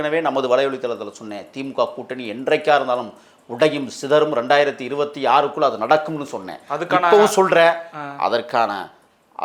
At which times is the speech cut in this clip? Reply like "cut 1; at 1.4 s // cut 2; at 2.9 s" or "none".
none